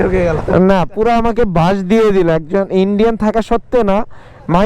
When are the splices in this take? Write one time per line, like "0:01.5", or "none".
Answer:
none